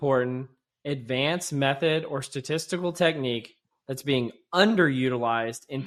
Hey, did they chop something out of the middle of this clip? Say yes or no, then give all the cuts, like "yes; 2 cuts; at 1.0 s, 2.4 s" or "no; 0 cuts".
no; 0 cuts